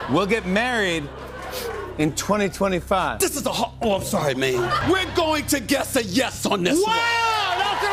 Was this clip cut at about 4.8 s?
yes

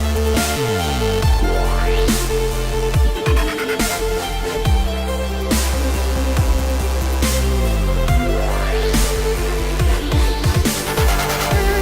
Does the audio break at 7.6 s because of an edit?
yes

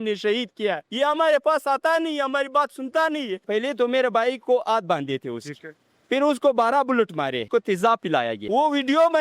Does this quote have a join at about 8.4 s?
yes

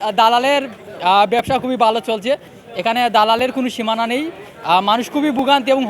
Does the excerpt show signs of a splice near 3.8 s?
no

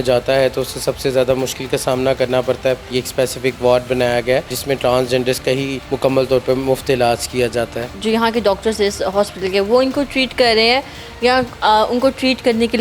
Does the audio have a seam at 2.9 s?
yes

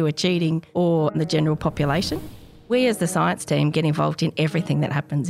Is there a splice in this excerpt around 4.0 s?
no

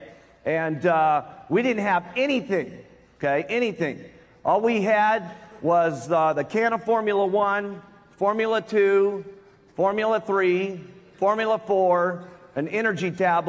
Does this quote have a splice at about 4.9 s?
no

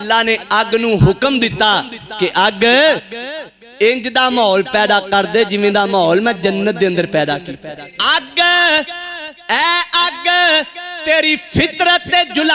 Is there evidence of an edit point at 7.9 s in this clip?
yes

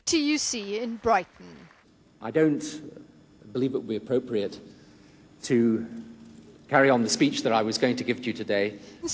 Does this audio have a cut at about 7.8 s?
no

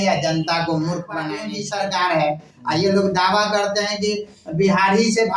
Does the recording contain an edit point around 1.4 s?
yes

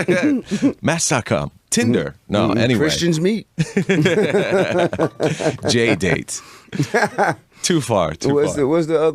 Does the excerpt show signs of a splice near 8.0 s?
yes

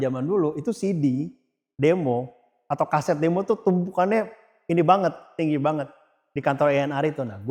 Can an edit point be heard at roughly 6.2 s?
no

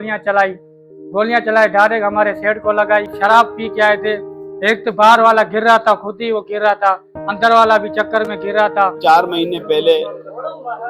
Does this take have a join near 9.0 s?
yes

